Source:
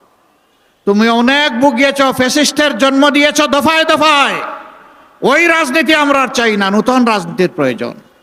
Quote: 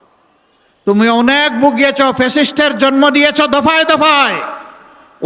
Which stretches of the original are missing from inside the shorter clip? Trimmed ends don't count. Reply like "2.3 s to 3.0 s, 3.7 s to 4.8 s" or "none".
none